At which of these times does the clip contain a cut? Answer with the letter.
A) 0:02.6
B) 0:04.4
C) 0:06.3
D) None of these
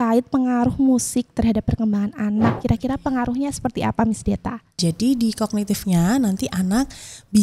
A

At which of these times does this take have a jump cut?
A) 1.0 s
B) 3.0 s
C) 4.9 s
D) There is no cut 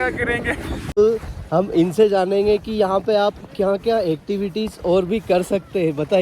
A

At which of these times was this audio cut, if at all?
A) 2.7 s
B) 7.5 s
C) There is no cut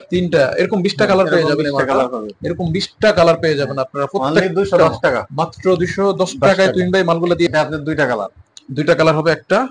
B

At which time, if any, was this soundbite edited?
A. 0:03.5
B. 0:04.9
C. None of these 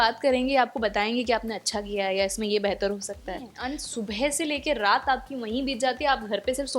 A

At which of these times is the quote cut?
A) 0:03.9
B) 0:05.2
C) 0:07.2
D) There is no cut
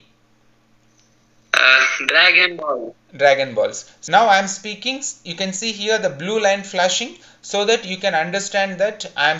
A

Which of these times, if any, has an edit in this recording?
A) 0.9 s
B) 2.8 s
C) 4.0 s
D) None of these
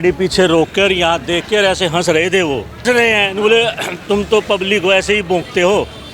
B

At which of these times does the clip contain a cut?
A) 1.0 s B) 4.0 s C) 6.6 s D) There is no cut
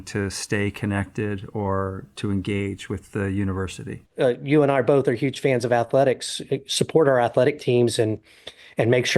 B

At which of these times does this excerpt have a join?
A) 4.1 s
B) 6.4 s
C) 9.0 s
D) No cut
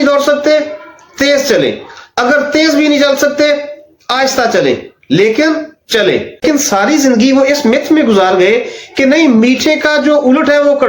B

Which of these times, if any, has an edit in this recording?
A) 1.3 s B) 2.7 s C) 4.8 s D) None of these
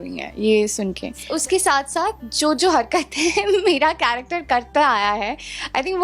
A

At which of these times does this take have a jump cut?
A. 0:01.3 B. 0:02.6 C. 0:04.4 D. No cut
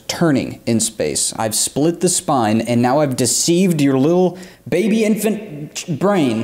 A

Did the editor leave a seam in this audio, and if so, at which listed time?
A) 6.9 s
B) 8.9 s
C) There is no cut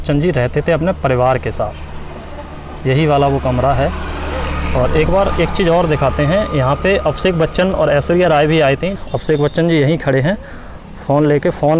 B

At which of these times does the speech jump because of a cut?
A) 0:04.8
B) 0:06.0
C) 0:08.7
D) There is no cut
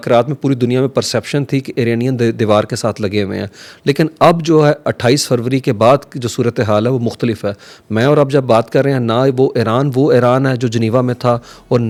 D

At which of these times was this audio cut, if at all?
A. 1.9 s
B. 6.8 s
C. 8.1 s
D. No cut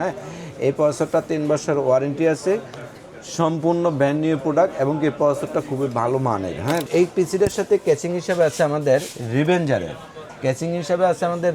B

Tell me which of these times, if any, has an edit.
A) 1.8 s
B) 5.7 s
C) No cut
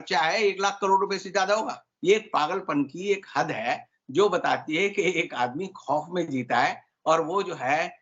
A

